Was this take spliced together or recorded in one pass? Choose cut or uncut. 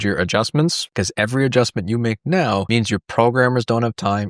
cut